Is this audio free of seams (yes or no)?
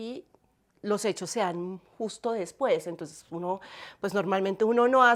yes